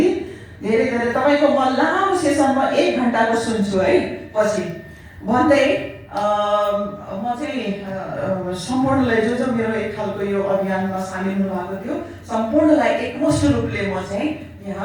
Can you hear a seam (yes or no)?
no